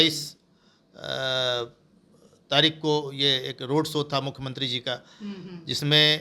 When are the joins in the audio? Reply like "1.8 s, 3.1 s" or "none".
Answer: none